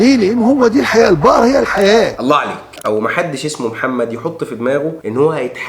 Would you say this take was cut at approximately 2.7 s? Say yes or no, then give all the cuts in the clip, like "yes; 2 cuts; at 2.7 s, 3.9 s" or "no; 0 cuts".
yes; 1 cut; at 2.7 s